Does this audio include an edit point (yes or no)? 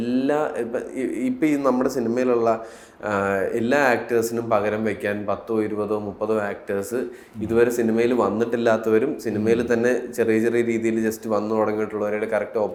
no